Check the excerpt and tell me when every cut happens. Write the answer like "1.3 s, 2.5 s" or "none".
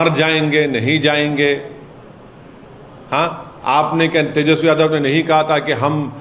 none